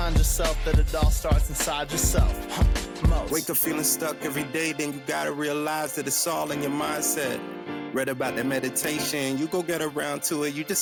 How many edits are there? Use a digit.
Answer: 0